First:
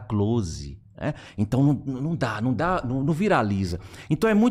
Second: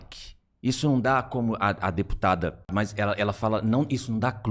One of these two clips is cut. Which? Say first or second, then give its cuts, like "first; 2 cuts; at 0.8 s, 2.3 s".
second; 1 cut; at 2.7 s